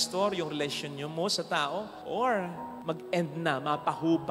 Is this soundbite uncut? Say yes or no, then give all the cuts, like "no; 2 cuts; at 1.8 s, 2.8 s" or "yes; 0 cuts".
yes; 0 cuts